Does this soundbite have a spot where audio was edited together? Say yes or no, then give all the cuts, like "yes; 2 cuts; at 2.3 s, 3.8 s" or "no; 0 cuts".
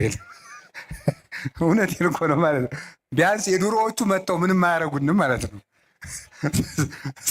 no; 0 cuts